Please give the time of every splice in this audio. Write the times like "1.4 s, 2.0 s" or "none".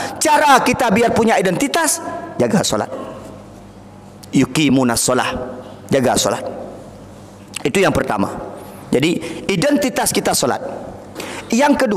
none